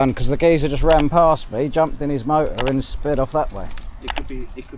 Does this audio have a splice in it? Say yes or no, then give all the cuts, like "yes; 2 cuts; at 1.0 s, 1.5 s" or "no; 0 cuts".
no; 0 cuts